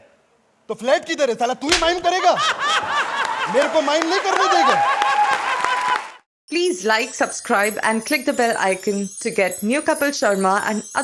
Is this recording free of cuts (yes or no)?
no